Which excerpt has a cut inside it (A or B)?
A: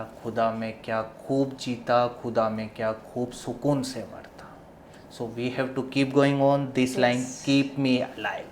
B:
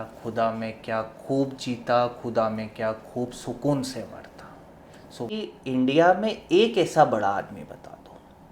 B